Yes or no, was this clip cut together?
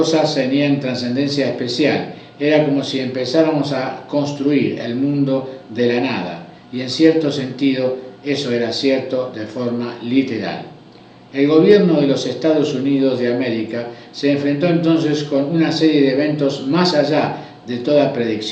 no